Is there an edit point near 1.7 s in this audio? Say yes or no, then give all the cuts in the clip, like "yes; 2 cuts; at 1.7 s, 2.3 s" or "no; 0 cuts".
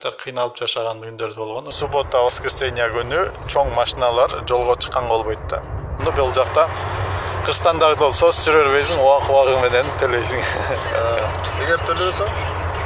yes; 2 cuts; at 1.7 s, 6.0 s